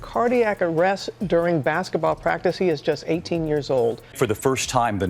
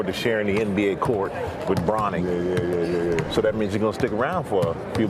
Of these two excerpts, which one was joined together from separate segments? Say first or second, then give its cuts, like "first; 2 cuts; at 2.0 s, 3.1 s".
first; 1 cut; at 4.1 s